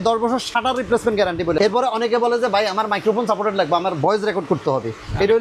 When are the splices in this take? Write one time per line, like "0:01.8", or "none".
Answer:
none